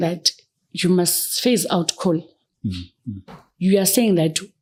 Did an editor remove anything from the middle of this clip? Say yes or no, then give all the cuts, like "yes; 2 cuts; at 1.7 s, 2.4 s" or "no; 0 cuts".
no; 0 cuts